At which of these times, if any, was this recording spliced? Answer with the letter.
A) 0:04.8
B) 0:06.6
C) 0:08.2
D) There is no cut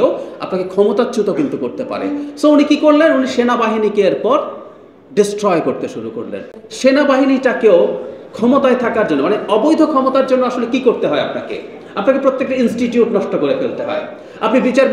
B